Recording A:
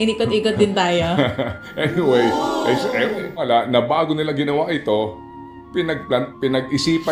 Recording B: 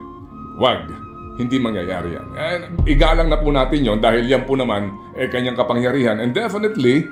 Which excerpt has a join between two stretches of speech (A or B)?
A